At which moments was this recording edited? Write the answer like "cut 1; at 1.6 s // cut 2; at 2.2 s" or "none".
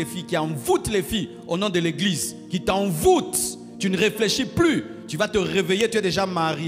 none